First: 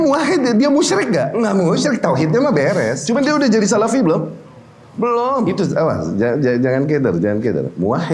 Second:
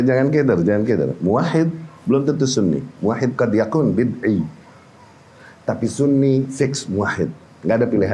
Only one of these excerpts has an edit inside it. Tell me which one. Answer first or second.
first